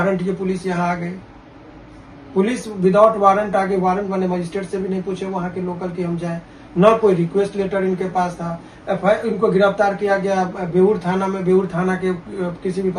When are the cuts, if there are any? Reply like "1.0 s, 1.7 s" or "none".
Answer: none